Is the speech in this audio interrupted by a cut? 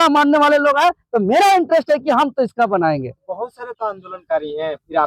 no; 0 cuts

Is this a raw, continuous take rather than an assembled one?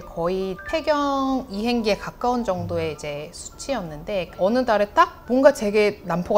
no; 1 cut; at 4.3 s

